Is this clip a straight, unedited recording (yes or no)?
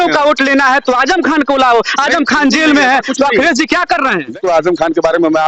no